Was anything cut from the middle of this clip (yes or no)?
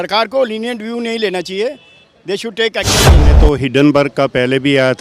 yes